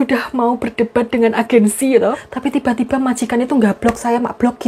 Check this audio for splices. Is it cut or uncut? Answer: cut